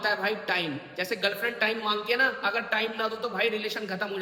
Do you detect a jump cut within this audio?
no; 0 cuts

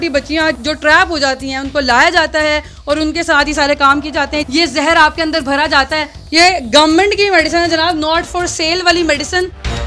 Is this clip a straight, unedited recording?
no; 2 cuts; at 4.5 s, 6.2 s

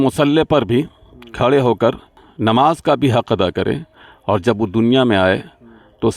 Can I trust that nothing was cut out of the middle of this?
no; 1 cut; at 2.2 s

